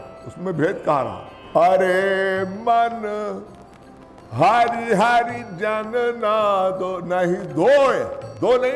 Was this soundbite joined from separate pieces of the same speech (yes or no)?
no